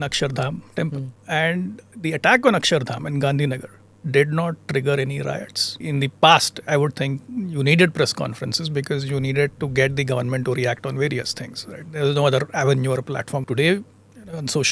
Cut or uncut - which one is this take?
cut